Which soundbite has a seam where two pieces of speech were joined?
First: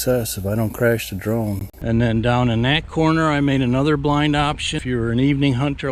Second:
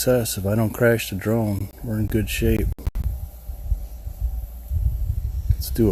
first; 2 cuts; at 1.7 s, 4.8 s

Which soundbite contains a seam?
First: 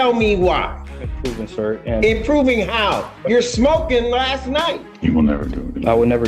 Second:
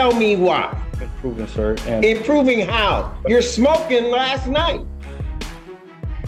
first; 1 cut; at 4.9 s

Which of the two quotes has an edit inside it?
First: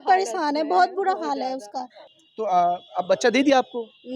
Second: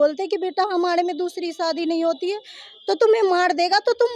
first; 1 cut; at 1.9 s

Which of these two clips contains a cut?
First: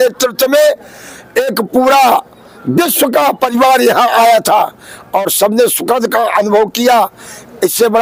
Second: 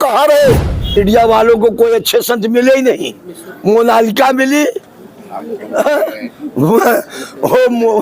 second; 1 cut; at 1.0 s

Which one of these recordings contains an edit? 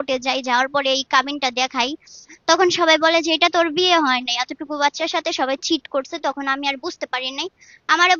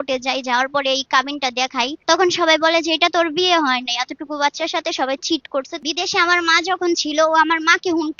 second; 2 cuts; at 2.0 s, 5.8 s

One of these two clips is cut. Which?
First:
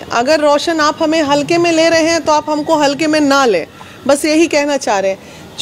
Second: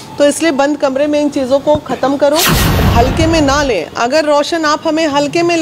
second; 1 cut; at 2.8 s

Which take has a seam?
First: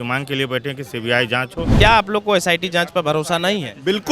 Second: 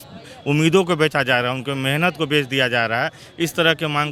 first; 1 cut; at 1.8 s

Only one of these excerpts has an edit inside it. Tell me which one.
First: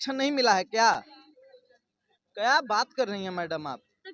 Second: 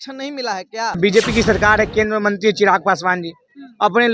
second; 1 cut; at 1.0 s

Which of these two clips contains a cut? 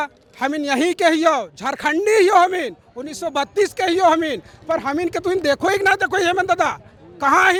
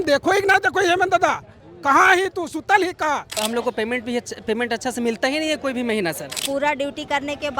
second; 2 cuts; at 3.4 s, 6.4 s

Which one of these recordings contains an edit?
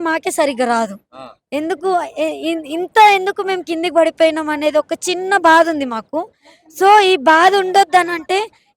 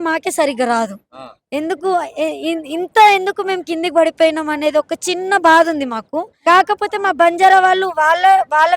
second; 1 cut; at 6.2 s

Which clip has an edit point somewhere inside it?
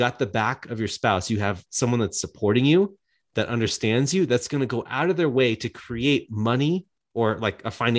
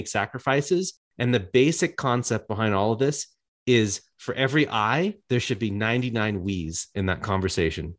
second; 1 cut; at 1.0 s

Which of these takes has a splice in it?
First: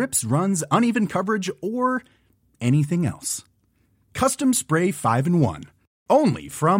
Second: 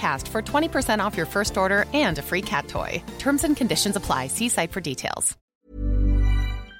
second; 1 cut; at 5.4 s

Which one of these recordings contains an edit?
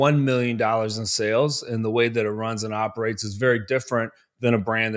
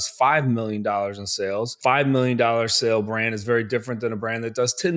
second; 1 cut; at 1.7 s

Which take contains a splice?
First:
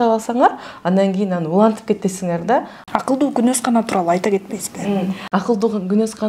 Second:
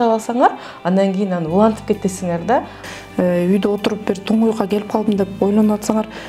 second; 1 cut; at 2.8 s

